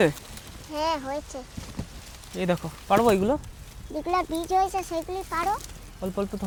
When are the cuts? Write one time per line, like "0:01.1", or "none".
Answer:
none